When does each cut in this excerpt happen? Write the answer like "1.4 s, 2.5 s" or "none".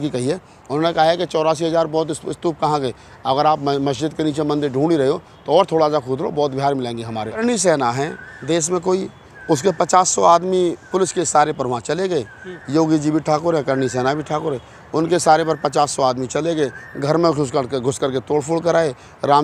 7.4 s